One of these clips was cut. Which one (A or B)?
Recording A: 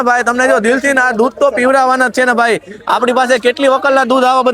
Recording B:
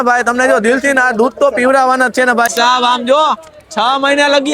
B